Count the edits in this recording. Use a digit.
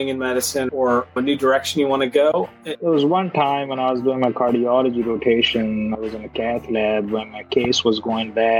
0